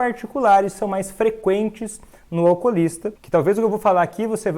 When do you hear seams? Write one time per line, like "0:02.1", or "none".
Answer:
0:03.1